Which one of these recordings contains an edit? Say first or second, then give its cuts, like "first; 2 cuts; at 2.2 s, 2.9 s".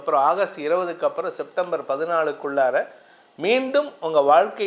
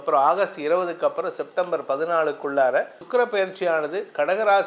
second; 1 cut; at 3.0 s